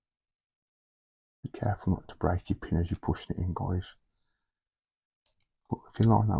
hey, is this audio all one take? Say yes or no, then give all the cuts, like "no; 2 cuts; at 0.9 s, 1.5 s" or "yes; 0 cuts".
yes; 0 cuts